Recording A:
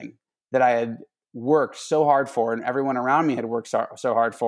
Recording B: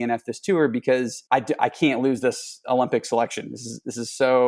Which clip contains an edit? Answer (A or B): B